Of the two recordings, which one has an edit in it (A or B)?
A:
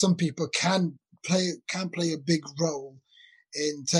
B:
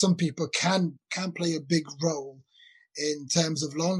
B